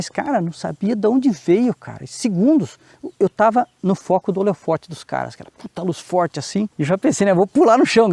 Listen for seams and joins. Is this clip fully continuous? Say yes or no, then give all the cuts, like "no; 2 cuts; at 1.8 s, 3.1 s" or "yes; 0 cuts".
yes; 0 cuts